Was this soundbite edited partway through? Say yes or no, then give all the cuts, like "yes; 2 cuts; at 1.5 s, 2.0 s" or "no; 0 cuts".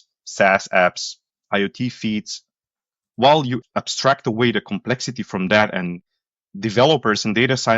yes; 1 cut; at 3.6 s